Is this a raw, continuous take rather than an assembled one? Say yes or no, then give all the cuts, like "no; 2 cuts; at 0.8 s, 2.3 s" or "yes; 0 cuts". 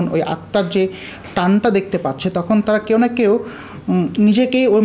yes; 0 cuts